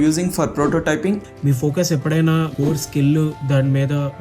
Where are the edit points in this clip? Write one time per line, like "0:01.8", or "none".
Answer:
0:01.2
0:02.5
0:03.4